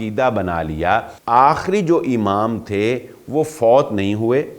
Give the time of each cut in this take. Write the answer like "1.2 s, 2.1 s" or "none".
1.1 s